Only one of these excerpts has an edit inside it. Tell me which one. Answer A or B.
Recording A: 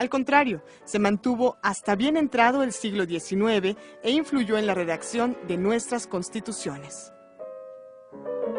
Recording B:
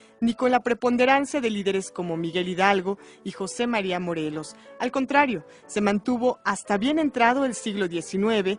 B